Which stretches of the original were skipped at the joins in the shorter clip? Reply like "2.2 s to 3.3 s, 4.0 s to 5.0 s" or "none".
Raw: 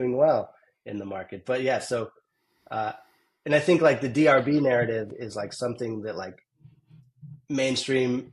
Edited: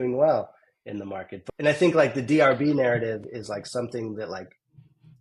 1.3 s to 3.1 s